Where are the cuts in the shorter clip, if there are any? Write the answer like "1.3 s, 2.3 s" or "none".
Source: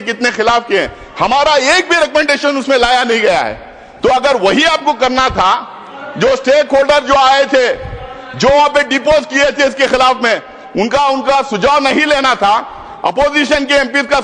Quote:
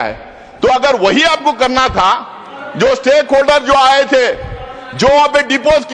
none